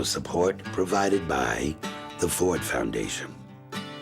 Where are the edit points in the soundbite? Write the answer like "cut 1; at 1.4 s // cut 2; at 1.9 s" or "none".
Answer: cut 1; at 3.1 s